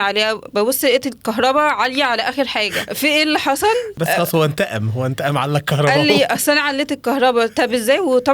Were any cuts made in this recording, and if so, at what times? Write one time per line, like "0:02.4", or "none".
0:02.8
0:03.9